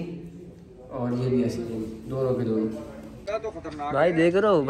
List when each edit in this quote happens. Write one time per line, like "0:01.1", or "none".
0:03.2